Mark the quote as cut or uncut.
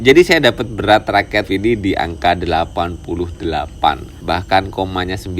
cut